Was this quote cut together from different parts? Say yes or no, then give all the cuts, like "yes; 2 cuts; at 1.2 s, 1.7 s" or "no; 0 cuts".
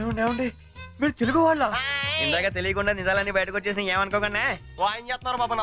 yes; 1 cut; at 4.7 s